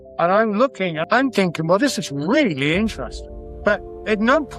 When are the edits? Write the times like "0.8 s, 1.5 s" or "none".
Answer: 1.0 s

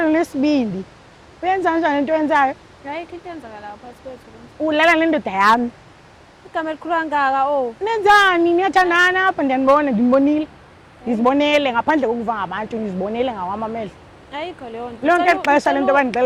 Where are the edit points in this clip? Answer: none

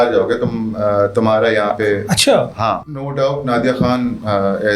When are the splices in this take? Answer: 3.1 s

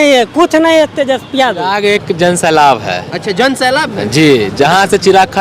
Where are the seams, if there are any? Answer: 1.7 s

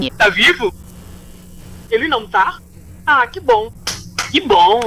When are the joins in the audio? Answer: none

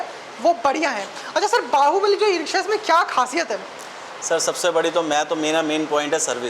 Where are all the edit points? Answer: none

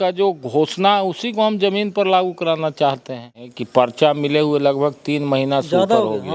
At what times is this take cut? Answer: 3.5 s

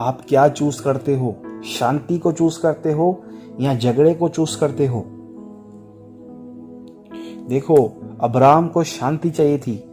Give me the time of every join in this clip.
5.4 s, 6.9 s

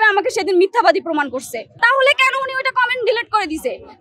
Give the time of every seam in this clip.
1.6 s

